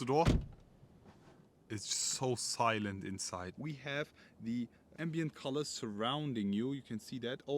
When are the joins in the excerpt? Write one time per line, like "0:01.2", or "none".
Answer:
0:03.5